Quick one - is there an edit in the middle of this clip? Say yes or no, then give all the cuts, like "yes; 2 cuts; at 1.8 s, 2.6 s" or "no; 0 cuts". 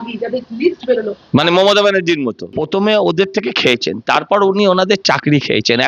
yes; 1 cut; at 2.4 s